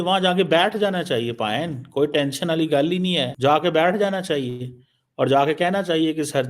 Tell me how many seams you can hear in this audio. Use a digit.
1